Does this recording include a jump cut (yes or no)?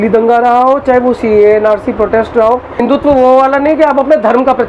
yes